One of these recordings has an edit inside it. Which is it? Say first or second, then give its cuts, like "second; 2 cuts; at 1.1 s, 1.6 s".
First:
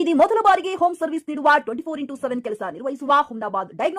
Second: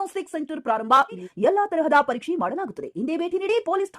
second; 1 cut; at 1.3 s